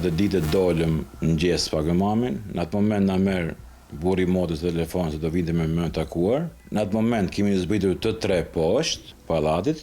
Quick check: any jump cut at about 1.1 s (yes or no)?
yes